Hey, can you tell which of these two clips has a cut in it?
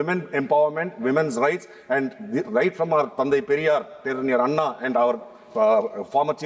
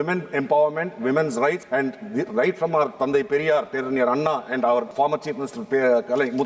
second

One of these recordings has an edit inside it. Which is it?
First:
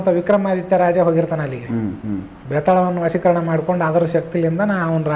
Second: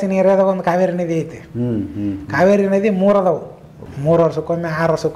second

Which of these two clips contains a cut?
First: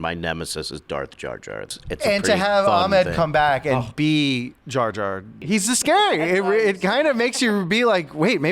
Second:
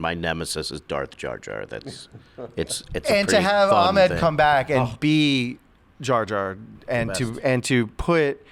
first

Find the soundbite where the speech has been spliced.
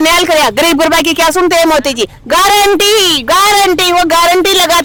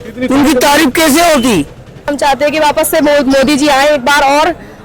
second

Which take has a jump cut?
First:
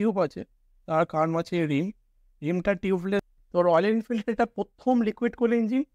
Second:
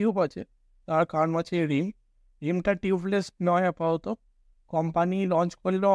first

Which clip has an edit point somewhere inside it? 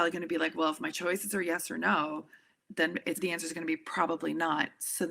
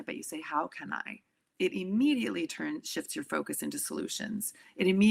first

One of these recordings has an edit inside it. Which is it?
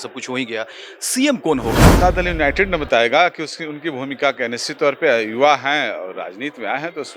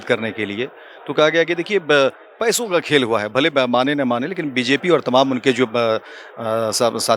first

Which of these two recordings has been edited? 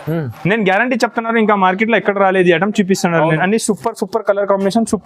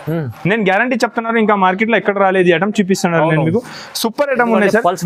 first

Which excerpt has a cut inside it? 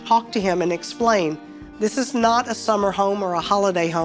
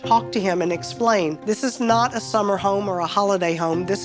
second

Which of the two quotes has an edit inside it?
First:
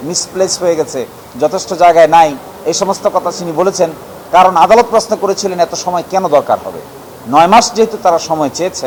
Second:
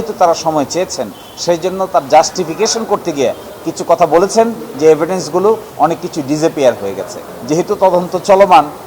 second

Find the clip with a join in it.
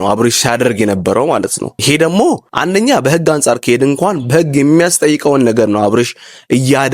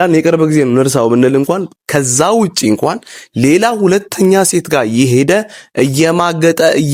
first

